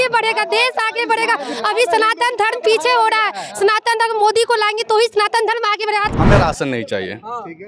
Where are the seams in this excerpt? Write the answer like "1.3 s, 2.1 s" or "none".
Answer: 6.1 s